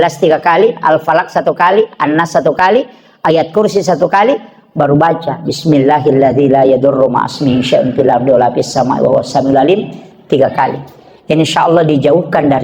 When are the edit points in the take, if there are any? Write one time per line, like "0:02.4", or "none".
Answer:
none